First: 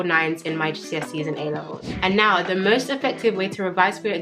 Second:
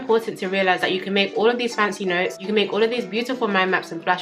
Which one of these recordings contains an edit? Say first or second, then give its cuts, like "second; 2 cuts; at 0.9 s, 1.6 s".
first; 1 cut; at 1.8 s